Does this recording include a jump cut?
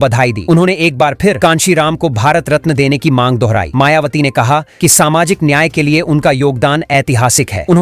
no; 0 cuts

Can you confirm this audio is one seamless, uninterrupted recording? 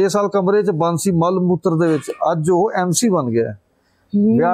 yes; 0 cuts

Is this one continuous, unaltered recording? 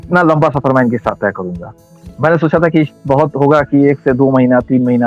yes; 0 cuts

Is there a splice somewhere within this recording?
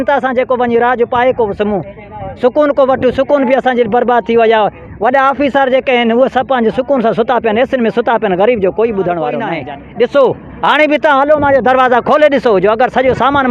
yes; 1 cut; at 9.6 s

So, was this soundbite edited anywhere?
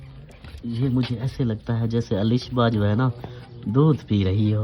no; 0 cuts

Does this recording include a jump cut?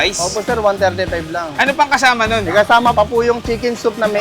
yes; 1 cut; at 2.9 s

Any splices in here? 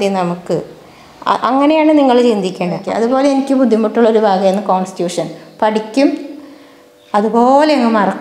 yes; 1 cut; at 2.9 s

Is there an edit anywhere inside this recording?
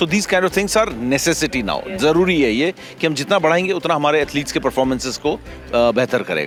no; 0 cuts

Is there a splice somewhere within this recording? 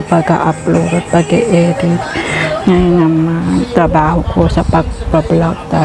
no; 0 cuts

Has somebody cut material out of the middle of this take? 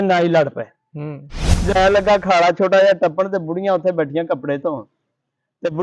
yes; 1 cut; at 1.7 s

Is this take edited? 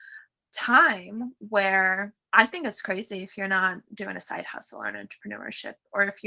yes; 1 cut; at 2.2 s

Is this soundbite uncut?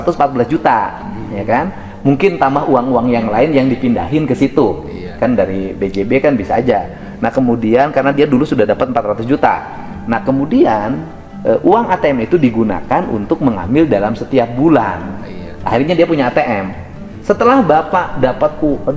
yes; 0 cuts

